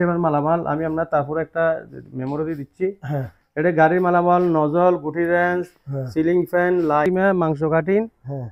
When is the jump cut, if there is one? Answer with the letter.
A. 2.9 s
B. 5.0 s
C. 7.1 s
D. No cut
C